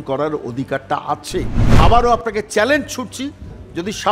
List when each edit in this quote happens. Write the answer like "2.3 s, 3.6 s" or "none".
1.6 s